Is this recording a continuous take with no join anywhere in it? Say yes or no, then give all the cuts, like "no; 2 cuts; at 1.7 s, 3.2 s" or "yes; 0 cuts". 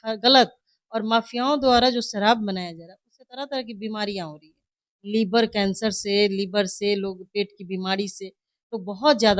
yes; 0 cuts